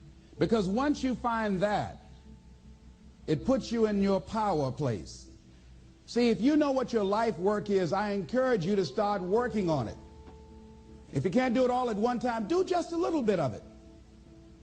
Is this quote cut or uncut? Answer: cut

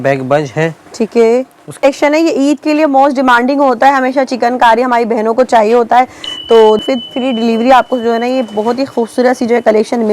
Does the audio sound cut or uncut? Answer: cut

